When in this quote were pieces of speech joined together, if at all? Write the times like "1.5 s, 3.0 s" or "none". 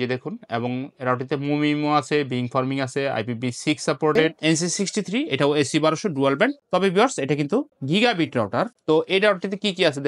4.4 s